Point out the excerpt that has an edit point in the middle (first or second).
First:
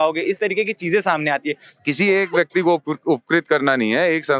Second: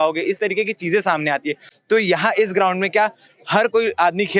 first